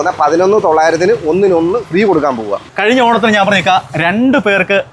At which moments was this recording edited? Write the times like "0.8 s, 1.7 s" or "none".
2.6 s